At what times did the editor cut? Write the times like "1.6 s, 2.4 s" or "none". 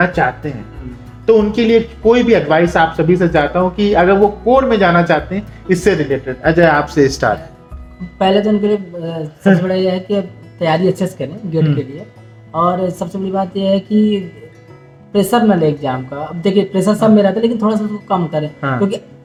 none